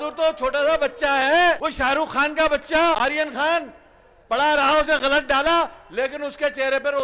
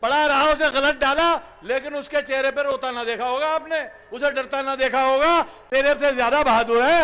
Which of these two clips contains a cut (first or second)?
first